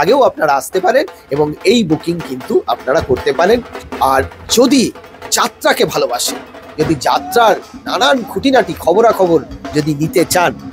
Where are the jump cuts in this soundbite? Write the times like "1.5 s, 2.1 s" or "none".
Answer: 3.8 s

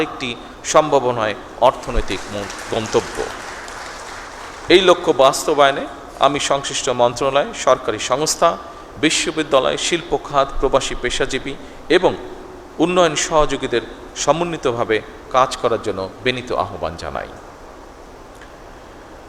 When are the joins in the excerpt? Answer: none

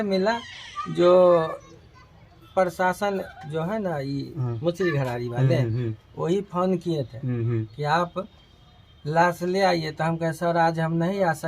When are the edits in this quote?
2.4 s

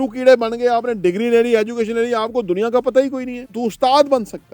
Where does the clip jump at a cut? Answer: 3.4 s

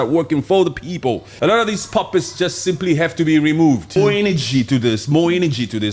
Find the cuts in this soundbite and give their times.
1.3 s, 4.0 s

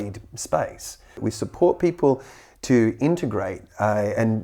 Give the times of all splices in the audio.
1.2 s

